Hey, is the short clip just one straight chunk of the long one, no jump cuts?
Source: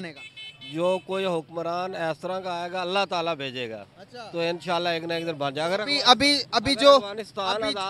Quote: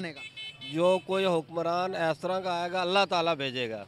yes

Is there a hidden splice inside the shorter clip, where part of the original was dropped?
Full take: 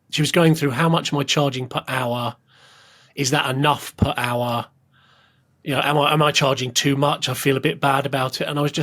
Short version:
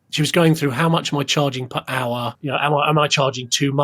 yes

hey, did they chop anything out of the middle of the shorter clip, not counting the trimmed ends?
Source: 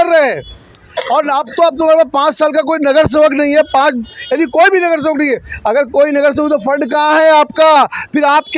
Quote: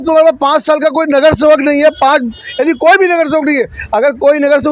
no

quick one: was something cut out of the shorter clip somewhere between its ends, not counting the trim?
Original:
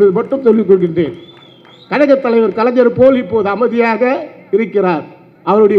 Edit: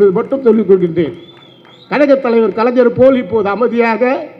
no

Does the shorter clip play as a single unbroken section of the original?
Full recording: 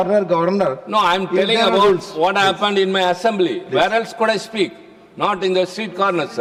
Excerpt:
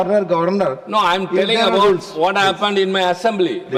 yes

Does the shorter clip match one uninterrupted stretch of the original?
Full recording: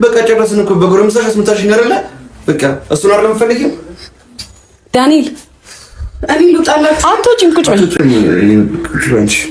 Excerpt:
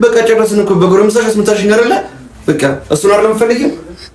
yes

